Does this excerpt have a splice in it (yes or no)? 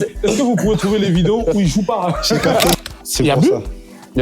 yes